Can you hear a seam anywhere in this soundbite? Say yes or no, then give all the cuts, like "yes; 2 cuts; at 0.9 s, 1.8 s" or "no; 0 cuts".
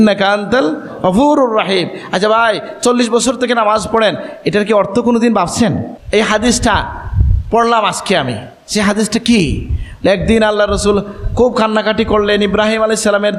yes; 1 cut; at 5.9 s